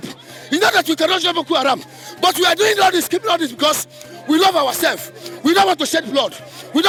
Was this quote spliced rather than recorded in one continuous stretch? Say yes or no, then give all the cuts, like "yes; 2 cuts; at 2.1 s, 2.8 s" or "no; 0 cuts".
no; 0 cuts